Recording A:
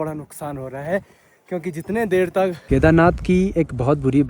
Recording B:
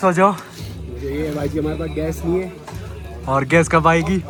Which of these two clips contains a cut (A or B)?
A